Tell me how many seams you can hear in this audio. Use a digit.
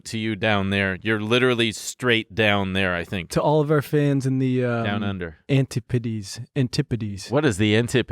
1